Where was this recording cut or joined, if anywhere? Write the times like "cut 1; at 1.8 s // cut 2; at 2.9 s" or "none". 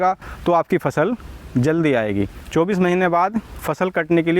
cut 1; at 2.4 s